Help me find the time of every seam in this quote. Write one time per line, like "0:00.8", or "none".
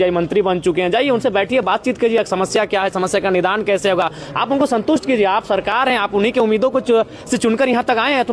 none

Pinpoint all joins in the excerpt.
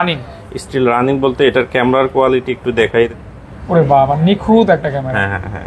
0:03.1

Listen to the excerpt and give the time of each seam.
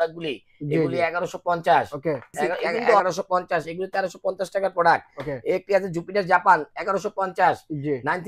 0:03.0

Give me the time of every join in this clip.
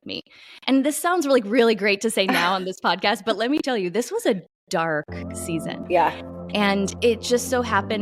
0:06.9

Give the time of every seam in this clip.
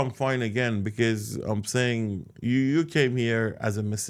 none

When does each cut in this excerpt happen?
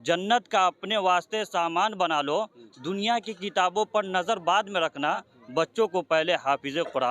none

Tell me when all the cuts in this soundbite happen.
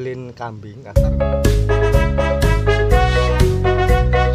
none

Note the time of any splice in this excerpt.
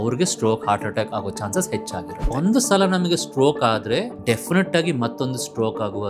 0:02.3
0:04.1

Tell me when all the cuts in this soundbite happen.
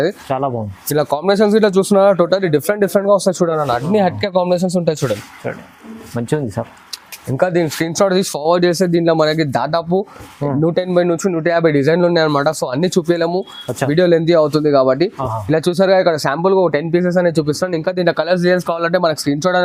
none

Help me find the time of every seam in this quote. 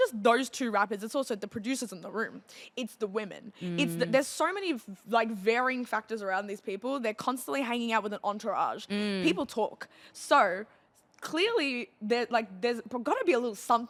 none

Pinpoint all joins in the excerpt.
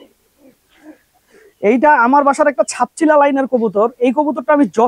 none

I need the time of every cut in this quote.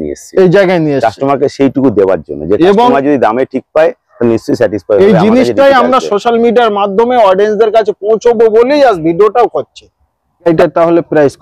0:10.5

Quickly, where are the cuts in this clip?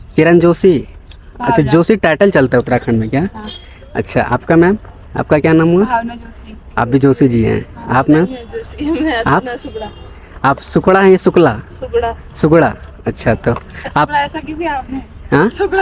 none

